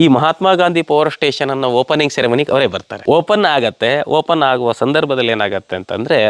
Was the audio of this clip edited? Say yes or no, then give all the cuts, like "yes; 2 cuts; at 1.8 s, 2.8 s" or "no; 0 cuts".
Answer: yes; 1 cut; at 2.9 s